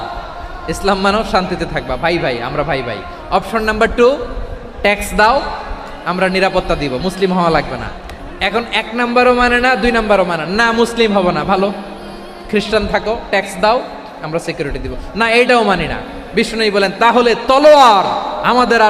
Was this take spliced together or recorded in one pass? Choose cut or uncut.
uncut